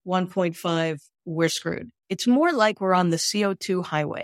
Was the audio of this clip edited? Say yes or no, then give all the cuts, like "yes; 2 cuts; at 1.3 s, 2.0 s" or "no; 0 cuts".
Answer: yes; 1 cut; at 2.0 s